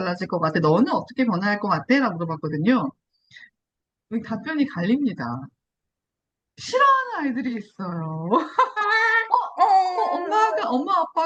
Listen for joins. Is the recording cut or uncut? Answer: uncut